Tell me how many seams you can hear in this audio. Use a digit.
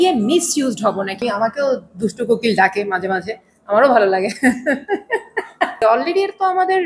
2